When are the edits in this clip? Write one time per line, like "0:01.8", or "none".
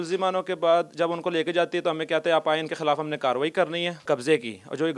0:04.0

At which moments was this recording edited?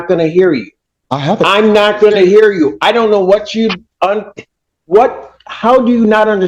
none

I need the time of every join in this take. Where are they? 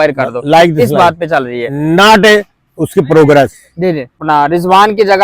0:04.2

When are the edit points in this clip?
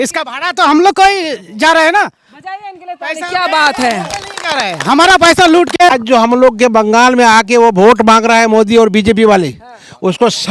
0:05.9

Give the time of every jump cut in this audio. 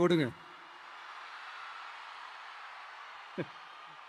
none

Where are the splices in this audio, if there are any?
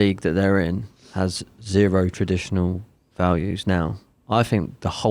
none

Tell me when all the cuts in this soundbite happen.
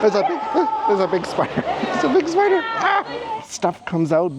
0:03.1

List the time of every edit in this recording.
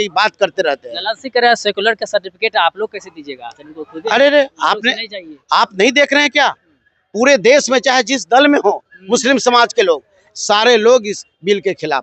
none

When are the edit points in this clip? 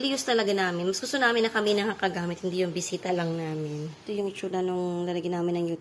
0:04.1

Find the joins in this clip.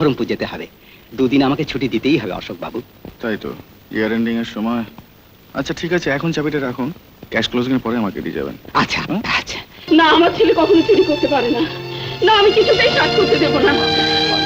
0:09.7

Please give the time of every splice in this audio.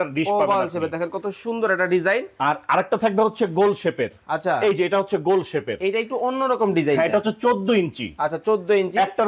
none

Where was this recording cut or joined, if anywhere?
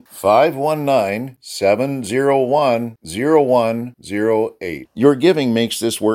none

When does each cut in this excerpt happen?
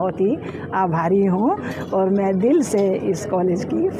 none

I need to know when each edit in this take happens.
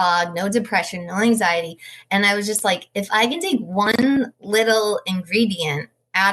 0:04.4

